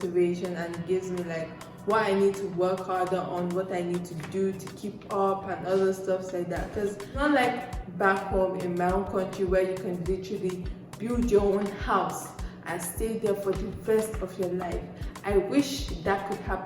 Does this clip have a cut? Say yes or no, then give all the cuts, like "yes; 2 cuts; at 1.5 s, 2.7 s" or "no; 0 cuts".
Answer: yes; 1 cut; at 7.1 s